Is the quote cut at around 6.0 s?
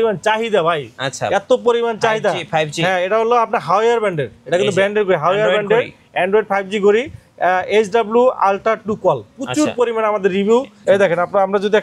no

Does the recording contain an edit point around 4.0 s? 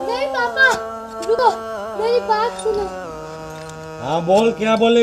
no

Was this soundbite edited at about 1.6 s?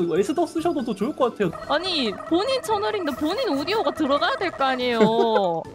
yes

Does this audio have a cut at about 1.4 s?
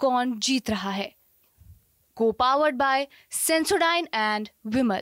no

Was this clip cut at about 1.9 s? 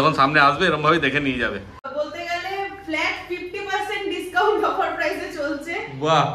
yes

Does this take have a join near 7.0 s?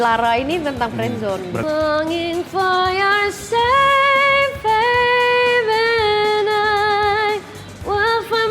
no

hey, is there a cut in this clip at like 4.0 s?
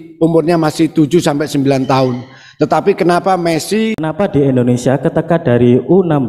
yes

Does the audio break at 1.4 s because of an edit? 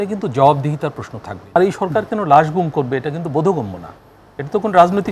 yes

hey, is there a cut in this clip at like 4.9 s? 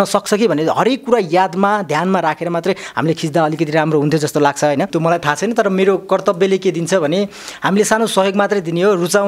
yes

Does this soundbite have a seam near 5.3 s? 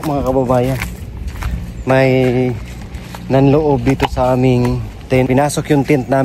yes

